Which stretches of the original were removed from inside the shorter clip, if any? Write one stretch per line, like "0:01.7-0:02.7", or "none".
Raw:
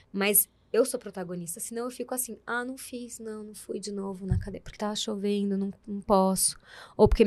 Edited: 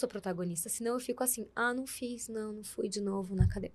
none